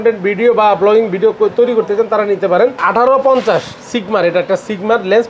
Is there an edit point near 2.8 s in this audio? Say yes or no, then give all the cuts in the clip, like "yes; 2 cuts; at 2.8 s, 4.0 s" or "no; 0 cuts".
yes; 1 cut; at 2.8 s